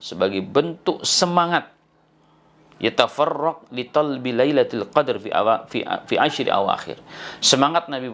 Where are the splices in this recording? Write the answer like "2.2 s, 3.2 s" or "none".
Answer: none